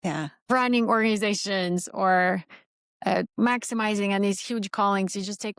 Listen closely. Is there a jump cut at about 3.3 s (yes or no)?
yes